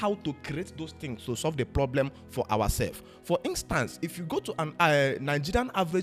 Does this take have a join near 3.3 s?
no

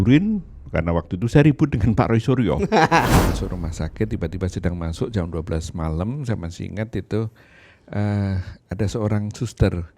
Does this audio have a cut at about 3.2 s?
yes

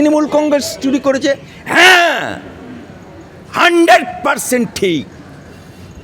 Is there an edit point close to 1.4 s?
no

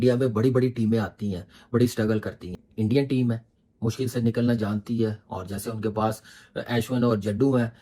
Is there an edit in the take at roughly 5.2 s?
no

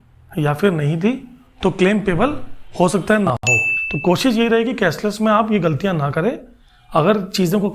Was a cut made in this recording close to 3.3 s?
yes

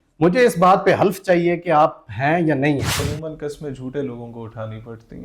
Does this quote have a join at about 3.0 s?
yes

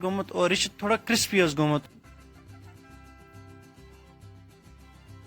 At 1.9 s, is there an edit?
yes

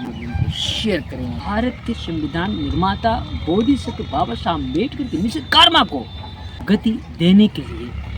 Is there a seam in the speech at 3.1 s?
no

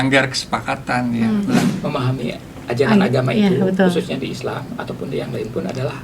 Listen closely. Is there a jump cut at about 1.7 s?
yes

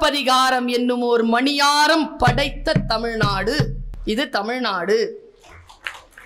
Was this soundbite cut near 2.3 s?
no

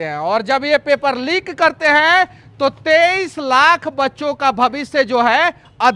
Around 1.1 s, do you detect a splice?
no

